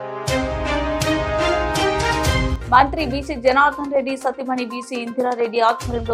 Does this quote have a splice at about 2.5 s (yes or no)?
yes